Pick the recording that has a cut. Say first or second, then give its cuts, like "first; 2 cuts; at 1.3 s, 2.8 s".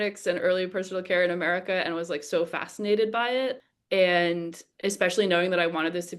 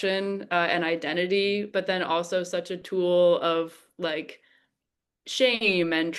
first; 1 cut; at 3.6 s